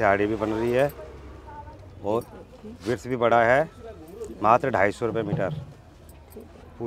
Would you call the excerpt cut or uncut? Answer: uncut